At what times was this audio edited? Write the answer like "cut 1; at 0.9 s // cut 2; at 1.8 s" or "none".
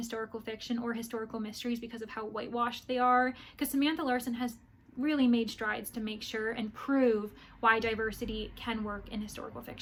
none